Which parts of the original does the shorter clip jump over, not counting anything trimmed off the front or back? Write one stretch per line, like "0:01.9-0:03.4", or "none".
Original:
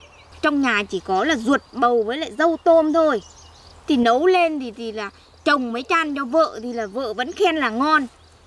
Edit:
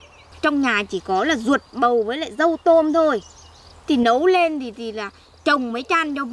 none